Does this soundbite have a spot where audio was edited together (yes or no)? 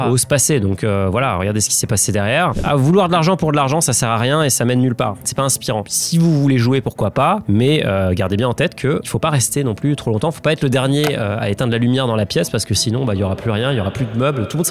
yes